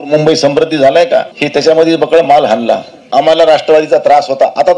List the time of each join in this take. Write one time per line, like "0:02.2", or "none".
0:01.4
0:02.9